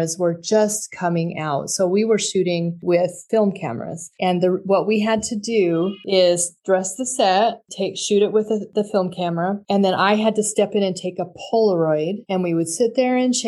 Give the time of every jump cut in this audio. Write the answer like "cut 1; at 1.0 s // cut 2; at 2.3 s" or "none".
none

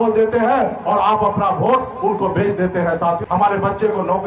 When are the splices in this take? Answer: cut 1; at 3.2 s

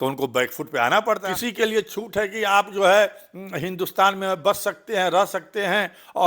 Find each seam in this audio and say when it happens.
cut 1; at 1.2 s

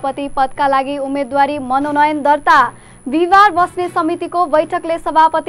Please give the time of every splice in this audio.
none

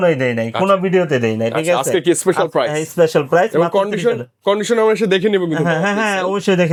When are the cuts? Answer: none

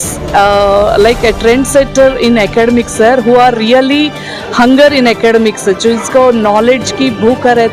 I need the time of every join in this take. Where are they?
none

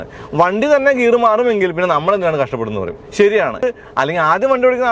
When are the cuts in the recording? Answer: cut 1; at 3.6 s

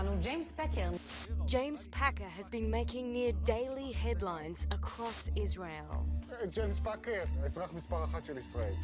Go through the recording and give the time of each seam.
none

